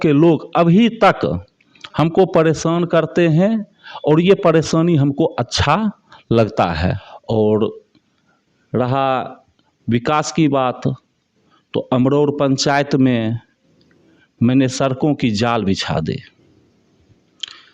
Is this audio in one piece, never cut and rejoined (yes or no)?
no